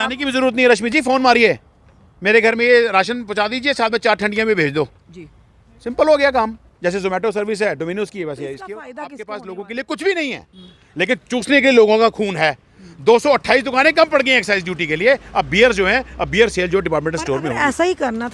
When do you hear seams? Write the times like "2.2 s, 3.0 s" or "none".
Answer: 9.1 s